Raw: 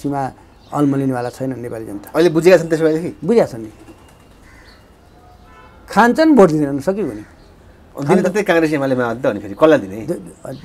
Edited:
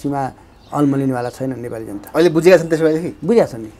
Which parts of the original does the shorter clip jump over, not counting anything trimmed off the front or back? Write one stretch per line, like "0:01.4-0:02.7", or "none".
none